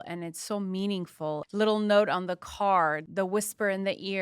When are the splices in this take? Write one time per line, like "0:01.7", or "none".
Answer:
0:01.4
0:03.0